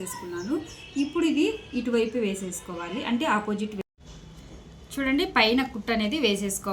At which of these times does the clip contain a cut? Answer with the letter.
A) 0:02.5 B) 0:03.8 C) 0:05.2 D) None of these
B